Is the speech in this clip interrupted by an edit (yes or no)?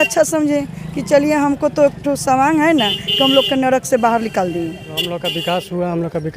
yes